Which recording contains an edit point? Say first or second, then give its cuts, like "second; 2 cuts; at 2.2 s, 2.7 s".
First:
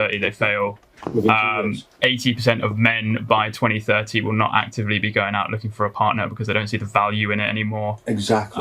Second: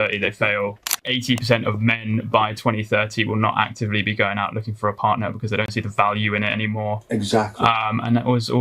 second; 1 cut; at 0.9 s